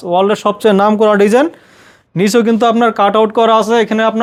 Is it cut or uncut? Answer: uncut